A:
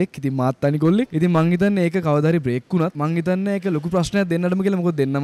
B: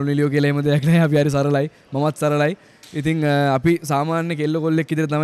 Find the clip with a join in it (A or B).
A